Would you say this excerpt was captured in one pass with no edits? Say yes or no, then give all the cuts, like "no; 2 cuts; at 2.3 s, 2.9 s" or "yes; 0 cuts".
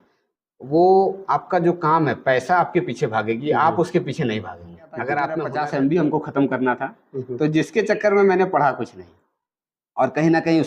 no; 1 cut; at 5.5 s